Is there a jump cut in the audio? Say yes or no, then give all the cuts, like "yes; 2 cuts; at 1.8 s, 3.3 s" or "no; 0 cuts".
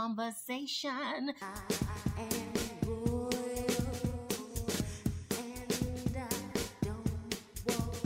yes; 1 cut; at 1.1 s